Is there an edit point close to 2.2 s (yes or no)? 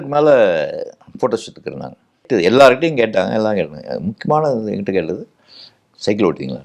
yes